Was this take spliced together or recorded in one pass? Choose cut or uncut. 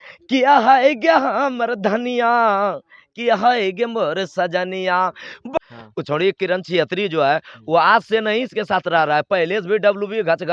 cut